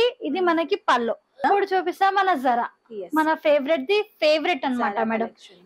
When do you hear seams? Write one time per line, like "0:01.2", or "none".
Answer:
0:01.4